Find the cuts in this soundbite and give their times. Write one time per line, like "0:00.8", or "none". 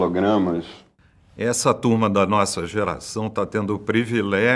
none